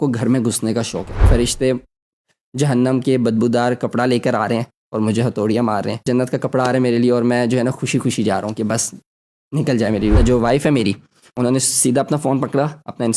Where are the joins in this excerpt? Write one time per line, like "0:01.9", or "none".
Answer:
0:01.3
0:06.1
0:10.2
0:11.3